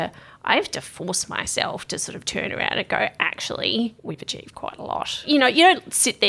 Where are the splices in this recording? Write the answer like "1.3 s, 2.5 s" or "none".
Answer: 5.2 s